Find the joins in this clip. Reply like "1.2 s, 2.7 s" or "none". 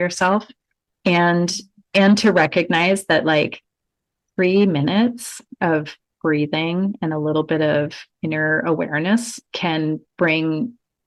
none